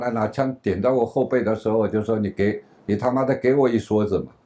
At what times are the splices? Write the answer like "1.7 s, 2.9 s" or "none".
none